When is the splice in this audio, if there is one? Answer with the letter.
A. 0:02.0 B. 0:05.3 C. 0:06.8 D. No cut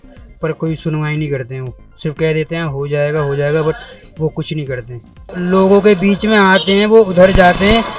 B